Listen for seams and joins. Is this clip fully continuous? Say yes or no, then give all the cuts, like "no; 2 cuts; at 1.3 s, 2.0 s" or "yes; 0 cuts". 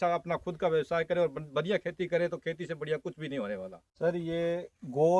no; 1 cut; at 3.8 s